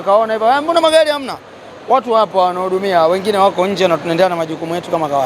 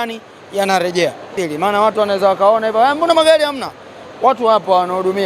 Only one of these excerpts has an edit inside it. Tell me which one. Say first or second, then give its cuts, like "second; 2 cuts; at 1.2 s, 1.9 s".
second; 1 cut; at 1.4 s